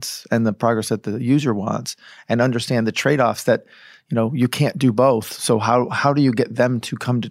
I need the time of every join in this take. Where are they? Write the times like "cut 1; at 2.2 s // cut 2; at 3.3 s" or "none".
none

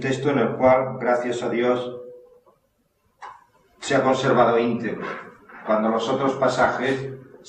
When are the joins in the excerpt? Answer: cut 1; at 4.4 s

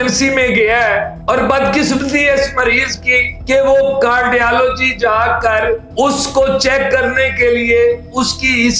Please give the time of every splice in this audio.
cut 1; at 1.1 s // cut 2; at 3.3 s

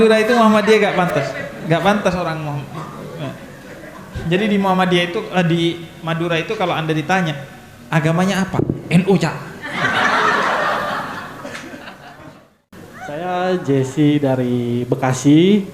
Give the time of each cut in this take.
cut 1; at 13.2 s

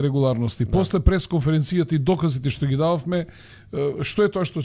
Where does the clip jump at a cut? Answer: none

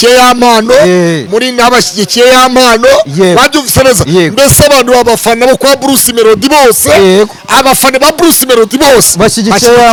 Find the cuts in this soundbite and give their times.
none

